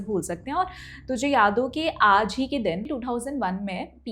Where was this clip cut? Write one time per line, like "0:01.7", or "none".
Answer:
0:02.9